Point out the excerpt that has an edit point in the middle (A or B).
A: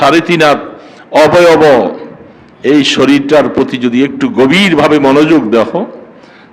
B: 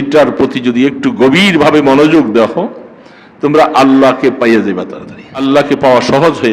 B